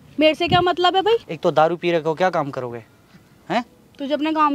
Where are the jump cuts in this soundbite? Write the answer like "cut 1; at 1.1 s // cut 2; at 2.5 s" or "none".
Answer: cut 1; at 1.2 s

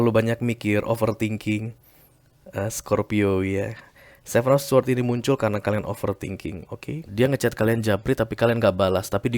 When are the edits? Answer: cut 1; at 7.0 s

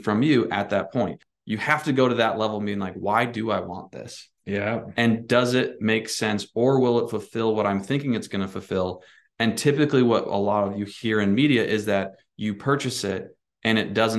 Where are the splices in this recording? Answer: cut 1; at 1.3 s

